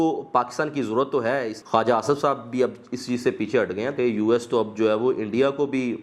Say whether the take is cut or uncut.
cut